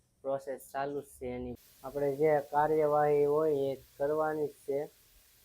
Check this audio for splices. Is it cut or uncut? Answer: cut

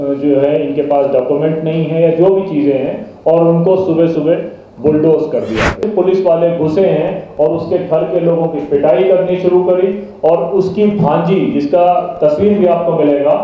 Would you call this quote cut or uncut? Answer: cut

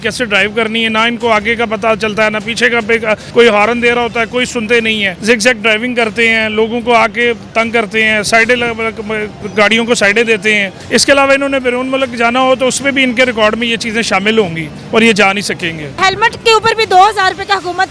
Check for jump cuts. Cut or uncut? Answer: cut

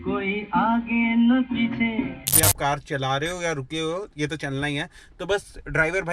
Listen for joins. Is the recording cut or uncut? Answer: cut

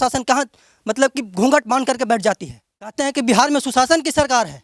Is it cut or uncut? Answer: cut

